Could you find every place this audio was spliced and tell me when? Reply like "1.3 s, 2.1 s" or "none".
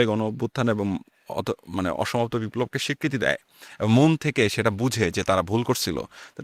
none